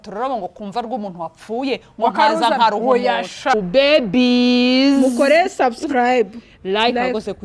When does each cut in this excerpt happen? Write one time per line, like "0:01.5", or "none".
0:03.5